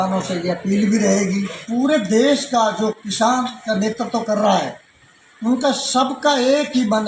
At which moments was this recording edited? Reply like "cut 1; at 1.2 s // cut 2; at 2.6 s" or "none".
cut 1; at 1.6 s